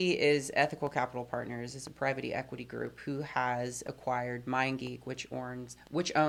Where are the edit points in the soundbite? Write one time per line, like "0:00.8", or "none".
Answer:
none